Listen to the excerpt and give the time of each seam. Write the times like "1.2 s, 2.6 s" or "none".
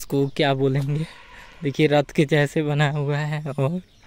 none